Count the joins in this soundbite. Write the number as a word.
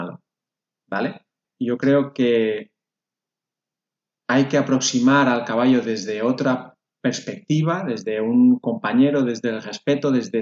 one